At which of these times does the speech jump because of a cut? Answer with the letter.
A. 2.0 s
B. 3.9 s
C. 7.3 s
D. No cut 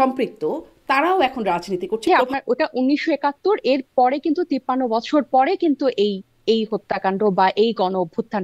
A